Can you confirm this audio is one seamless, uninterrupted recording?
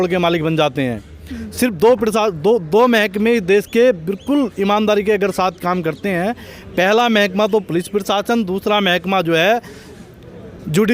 yes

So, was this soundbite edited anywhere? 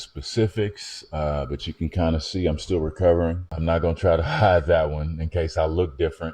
yes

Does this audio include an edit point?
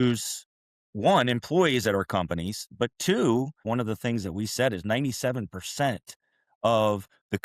yes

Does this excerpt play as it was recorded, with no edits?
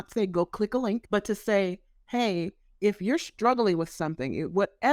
no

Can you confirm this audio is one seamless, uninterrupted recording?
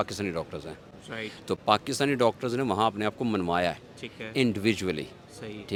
yes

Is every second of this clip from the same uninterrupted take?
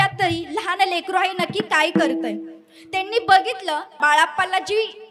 no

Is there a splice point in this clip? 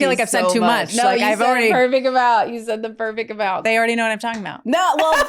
yes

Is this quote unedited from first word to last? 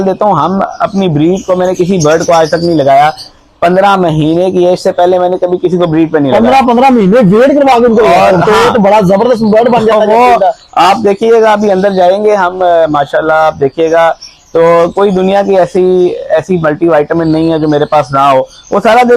yes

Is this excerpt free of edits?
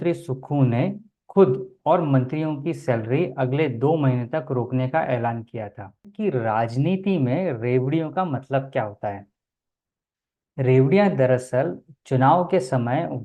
no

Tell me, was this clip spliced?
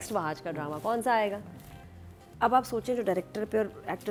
no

